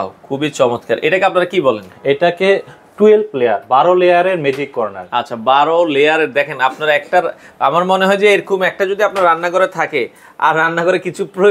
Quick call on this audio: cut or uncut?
uncut